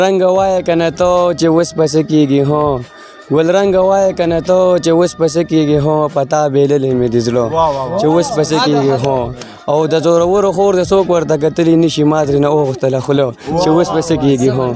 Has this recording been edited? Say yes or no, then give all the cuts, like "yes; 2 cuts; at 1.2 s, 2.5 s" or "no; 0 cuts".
no; 0 cuts